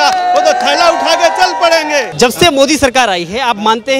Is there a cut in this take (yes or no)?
yes